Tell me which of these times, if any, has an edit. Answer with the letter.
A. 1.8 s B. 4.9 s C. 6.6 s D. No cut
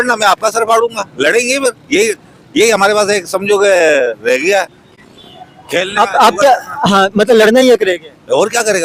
D